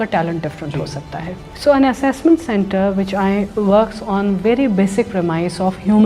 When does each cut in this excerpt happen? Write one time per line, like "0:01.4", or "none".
0:01.4
0:03.5